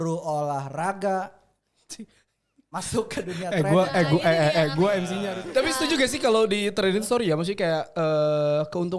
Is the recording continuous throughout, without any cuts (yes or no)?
no